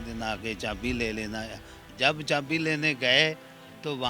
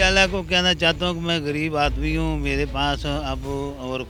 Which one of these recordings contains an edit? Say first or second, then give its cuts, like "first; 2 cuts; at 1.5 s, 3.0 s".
first; 1 cut; at 1.8 s